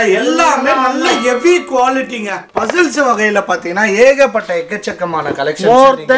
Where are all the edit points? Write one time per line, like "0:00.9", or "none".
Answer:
0:02.4